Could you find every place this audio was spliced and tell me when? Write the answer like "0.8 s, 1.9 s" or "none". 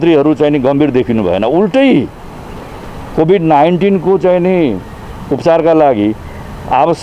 none